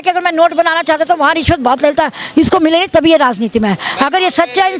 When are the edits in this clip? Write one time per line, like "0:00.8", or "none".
none